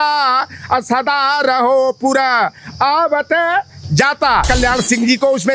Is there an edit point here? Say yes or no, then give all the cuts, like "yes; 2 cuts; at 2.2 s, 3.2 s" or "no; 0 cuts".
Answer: yes; 1 cut; at 4.5 s